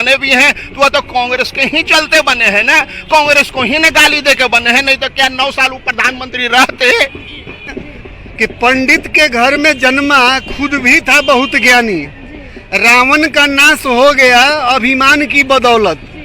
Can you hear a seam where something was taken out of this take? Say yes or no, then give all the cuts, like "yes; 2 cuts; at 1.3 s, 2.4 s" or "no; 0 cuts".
yes; 1 cut; at 7.7 s